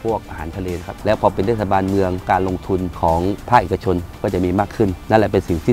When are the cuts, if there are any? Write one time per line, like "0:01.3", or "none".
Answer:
0:00.9

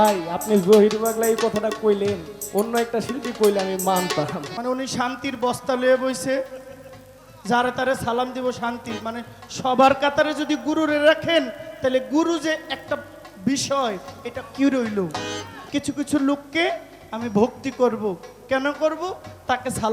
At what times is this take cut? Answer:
0:04.5
0:15.5

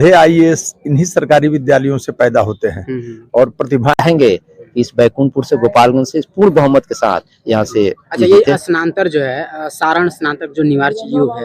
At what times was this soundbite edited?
0:04.0

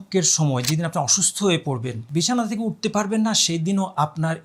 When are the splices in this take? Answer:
0:01.9

